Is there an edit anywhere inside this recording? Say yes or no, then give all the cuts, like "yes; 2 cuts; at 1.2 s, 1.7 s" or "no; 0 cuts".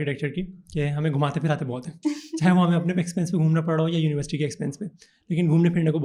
no; 0 cuts